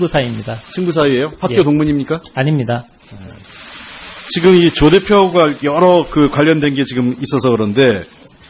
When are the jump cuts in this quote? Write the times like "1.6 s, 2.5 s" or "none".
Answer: 5.9 s